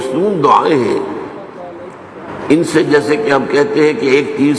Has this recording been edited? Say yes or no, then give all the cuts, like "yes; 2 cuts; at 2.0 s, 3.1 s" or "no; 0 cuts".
no; 0 cuts